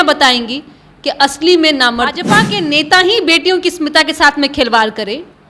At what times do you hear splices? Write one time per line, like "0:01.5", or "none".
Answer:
0:02.3